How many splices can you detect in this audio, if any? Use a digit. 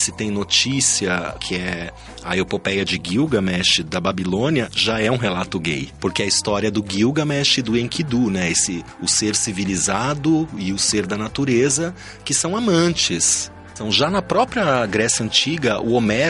3